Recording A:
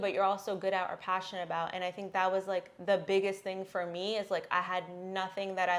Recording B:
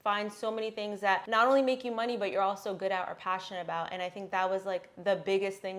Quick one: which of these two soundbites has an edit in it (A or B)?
B